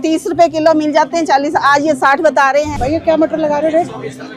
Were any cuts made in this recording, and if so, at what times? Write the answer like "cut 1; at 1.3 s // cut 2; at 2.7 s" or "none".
cut 1; at 2.7 s